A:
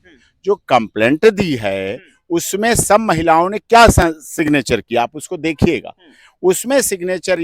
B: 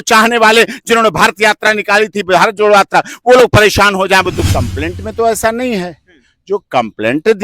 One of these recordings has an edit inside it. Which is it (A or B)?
B